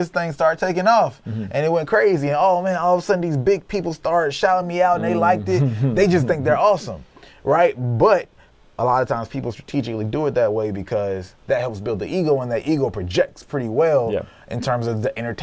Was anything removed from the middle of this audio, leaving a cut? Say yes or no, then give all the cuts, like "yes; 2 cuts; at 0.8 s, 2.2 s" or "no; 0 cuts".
no; 0 cuts